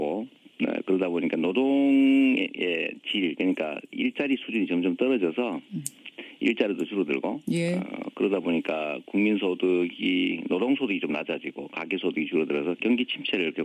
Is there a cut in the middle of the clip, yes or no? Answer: no